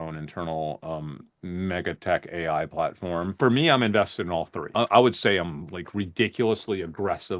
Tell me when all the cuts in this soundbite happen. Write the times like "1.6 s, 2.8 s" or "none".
3.3 s, 4.7 s

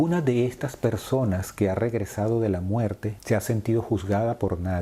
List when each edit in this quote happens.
3.1 s

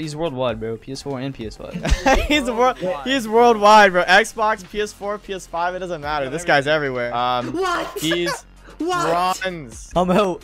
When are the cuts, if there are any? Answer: 7.1 s

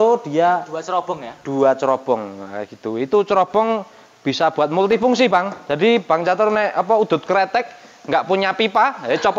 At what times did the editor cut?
none

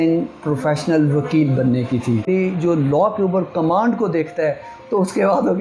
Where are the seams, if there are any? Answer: 2.2 s

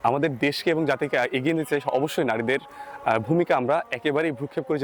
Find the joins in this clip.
none

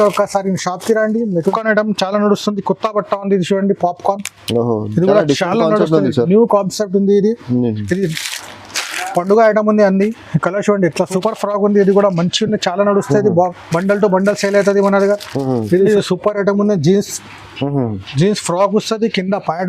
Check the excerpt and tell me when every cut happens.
1.4 s, 11.1 s, 15.9 s

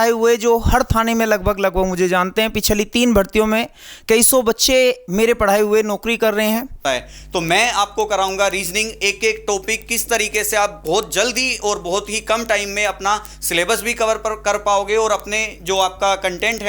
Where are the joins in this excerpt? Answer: 6.8 s

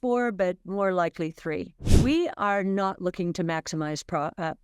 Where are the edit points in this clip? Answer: 1.8 s

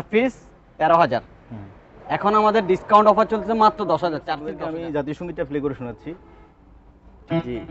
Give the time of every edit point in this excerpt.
4.5 s

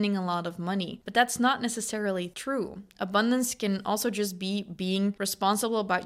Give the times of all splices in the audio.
1.0 s, 2.3 s, 5.2 s

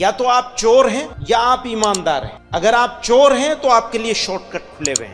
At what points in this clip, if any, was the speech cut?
1.1 s, 2.4 s

